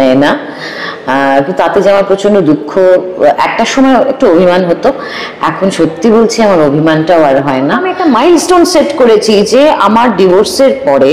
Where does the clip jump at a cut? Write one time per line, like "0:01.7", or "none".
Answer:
0:07.9

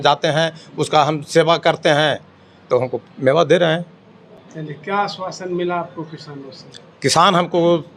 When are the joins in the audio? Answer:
none

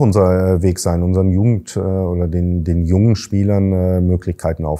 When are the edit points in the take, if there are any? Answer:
none

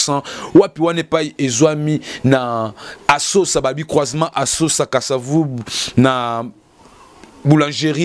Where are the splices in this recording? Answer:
none

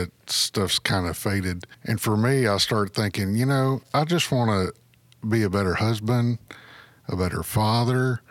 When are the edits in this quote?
0:01.7
0:03.8

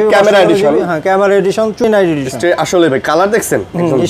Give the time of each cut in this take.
0:01.9

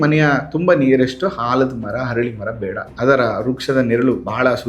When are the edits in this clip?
0:02.9

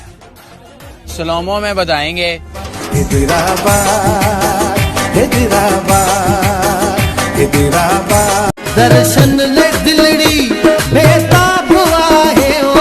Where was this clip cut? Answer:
0:08.5

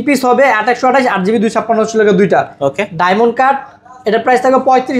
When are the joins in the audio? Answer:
none

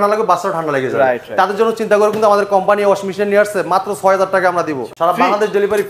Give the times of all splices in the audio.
0:04.8

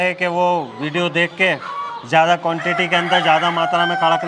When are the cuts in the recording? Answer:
none

